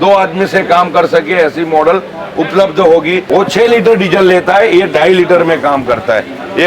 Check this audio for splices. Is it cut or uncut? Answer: cut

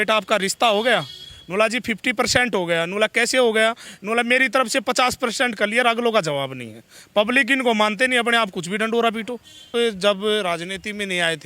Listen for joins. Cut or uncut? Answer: cut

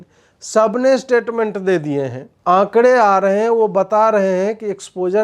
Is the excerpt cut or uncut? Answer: cut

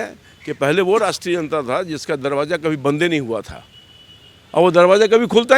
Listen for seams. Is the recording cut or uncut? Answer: uncut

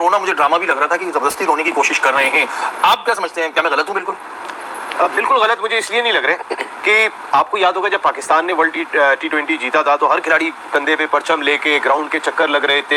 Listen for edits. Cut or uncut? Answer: uncut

